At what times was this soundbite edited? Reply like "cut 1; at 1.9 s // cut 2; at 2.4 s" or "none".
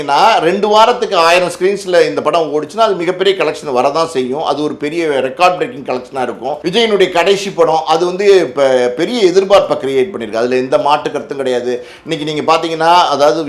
cut 1; at 6.6 s